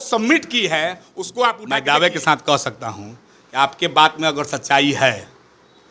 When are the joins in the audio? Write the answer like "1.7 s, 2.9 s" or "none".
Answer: 1.6 s